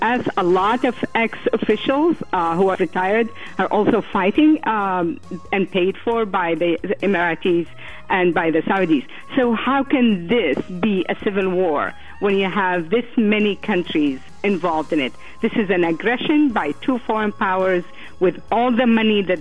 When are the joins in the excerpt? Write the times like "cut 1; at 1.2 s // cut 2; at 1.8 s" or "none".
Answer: cut 1; at 2.7 s // cut 2; at 15.2 s